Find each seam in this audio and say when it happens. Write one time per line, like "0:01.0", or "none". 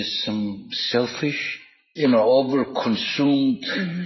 0:01.9